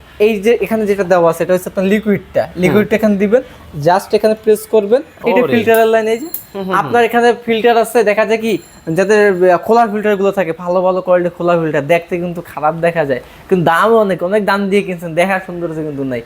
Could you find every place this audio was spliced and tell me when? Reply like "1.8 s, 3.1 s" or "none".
5.1 s